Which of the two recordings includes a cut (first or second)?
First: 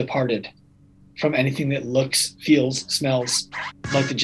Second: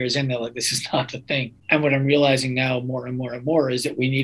second